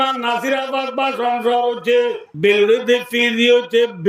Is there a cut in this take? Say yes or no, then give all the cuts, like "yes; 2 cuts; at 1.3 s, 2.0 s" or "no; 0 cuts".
yes; 1 cut; at 2.3 s